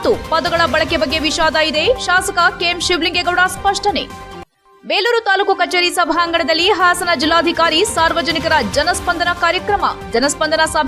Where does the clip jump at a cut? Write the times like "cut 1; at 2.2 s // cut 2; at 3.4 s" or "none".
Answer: none